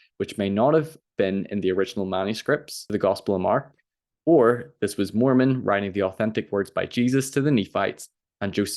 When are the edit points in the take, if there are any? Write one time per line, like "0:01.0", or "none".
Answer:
0:02.8